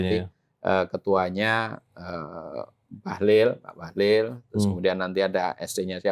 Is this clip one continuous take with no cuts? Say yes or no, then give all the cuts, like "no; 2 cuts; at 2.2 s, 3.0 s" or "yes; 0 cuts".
yes; 0 cuts